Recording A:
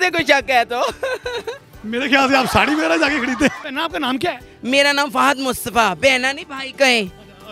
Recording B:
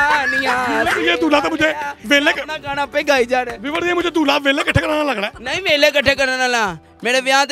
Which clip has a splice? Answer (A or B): A